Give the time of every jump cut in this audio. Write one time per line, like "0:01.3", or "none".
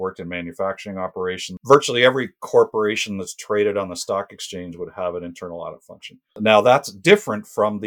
0:01.5
0:06.4